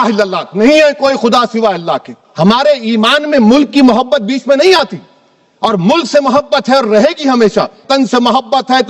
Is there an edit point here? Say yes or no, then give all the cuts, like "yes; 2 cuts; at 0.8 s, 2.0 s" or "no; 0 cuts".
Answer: yes; 2 cuts; at 2.2 s, 7.9 s